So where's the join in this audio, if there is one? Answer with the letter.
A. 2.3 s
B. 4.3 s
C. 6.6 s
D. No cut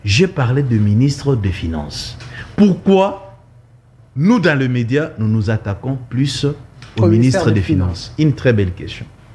D